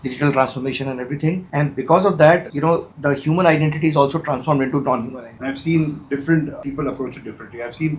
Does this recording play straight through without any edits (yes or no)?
no